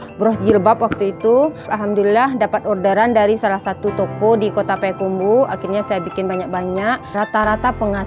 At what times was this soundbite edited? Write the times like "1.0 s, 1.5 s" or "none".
1.7 s, 7.0 s